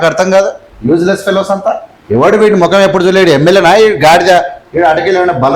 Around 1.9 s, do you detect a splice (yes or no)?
yes